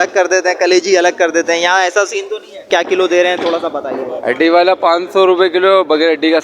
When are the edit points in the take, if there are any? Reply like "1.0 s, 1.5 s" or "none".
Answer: 2.7 s